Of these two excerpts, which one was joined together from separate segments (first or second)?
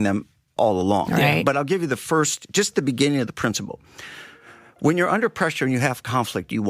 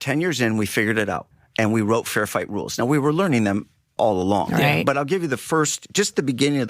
second